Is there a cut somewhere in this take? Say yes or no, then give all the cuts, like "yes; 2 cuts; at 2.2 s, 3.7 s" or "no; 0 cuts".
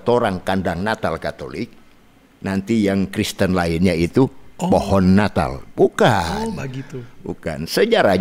no; 0 cuts